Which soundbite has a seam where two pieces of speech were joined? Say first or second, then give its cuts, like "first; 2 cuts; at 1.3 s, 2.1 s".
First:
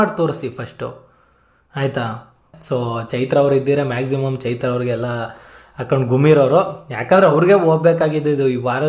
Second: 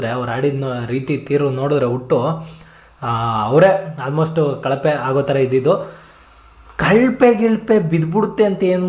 first; 1 cut; at 2.5 s